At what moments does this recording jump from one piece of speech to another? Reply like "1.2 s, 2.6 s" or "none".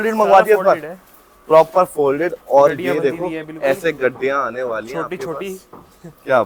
none